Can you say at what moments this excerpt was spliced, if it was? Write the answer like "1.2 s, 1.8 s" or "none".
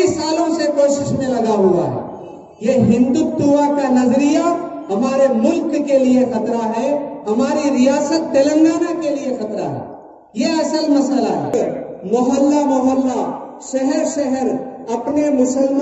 11.5 s